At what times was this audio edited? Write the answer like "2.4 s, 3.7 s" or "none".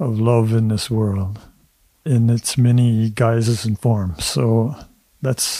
2.0 s